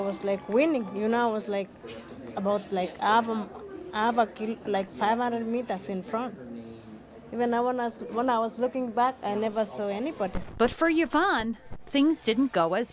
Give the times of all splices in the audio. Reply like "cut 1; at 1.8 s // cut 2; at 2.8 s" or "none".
cut 1; at 7.7 s